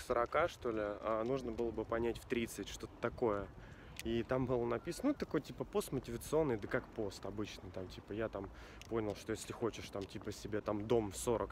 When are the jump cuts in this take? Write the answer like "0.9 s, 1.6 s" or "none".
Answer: none